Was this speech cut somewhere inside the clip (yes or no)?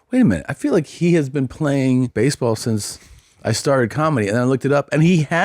yes